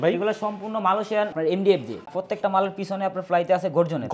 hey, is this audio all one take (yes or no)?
no